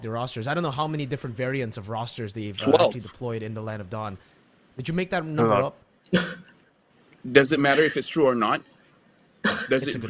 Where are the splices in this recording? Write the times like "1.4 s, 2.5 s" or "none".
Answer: none